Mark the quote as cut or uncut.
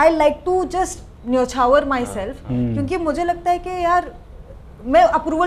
uncut